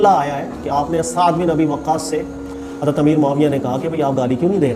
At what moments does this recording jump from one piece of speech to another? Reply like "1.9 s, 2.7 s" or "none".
none